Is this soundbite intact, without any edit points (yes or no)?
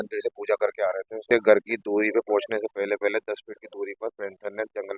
no